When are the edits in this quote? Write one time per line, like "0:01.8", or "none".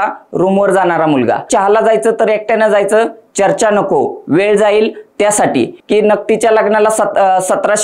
0:01.5
0:05.8